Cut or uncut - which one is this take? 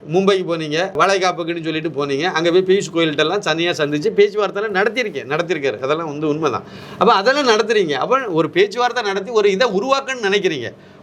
cut